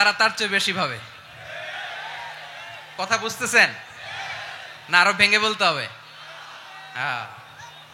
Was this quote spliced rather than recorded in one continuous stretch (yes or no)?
no